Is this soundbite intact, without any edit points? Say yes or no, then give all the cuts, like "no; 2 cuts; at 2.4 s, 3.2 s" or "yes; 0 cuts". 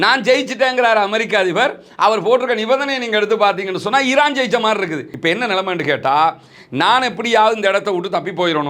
no; 1 cut; at 5.1 s